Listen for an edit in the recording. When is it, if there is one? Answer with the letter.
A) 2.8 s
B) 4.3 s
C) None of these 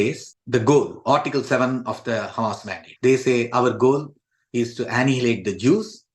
A